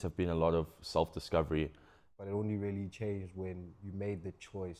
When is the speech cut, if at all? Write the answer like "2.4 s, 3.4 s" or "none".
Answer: 2.1 s